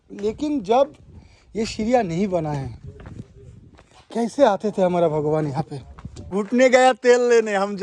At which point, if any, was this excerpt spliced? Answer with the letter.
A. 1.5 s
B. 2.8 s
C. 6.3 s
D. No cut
C